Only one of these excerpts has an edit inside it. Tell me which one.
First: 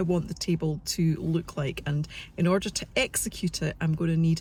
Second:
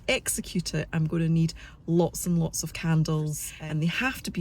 second; 1 cut; at 3.5 s

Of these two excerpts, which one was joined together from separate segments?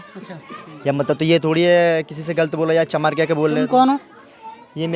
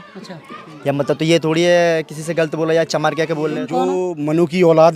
second; 1 cut; at 3.8 s

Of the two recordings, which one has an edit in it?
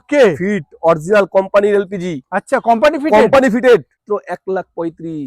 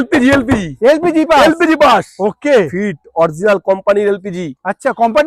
first; 1 cut; at 4.0 s

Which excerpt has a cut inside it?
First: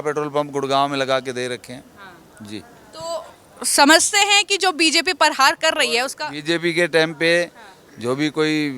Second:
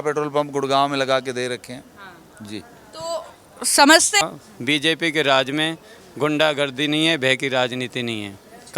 second; 1 cut; at 4.2 s

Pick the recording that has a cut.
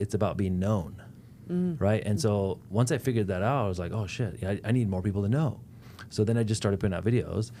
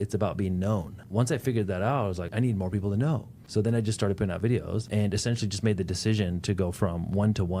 second; 4 cuts; at 1.0 s, 2.3 s, 3.3 s, 4.9 s

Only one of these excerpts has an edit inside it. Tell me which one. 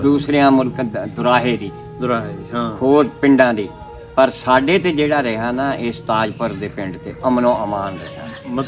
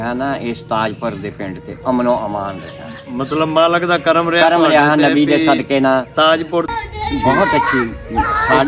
second; 1 cut; at 6.7 s

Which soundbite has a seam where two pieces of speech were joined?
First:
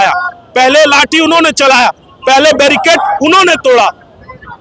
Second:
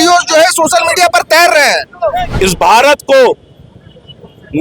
second; 1 cut; at 2.3 s

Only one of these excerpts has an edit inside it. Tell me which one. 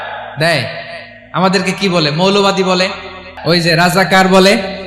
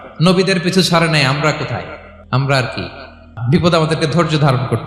first; 1 cut; at 3.3 s

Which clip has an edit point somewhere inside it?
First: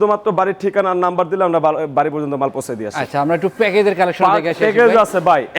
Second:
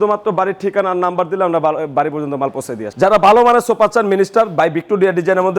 second; 1 cut; at 2.9 s

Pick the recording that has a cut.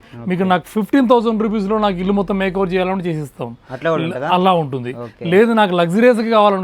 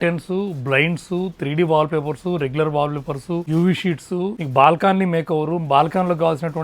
second; 2 cuts; at 3.4 s, 4.4 s

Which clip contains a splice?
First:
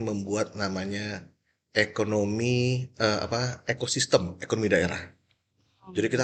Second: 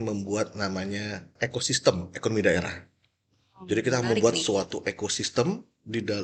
second; 1 cut; at 1.3 s

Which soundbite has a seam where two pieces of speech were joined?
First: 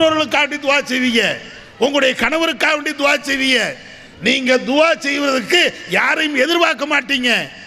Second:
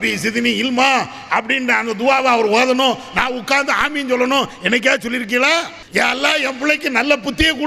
second; 1 cut; at 5.8 s

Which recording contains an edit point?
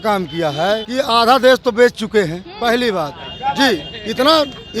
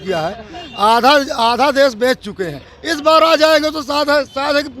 first; 2 cuts; at 0.9 s, 2.4 s

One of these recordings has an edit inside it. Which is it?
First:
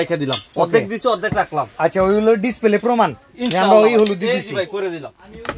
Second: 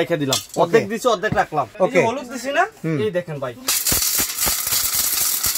second; 1 cut; at 1.7 s

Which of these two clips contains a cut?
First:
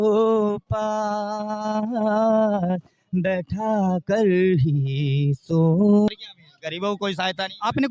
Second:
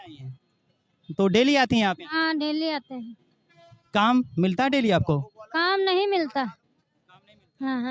first; 1 cut; at 6.1 s

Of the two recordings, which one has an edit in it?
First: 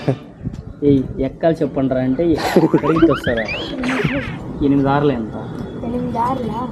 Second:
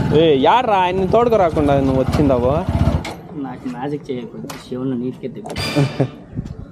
first; 1 cut; at 4.2 s

